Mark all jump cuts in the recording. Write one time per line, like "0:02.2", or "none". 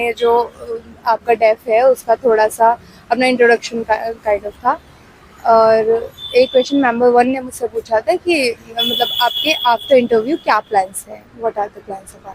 none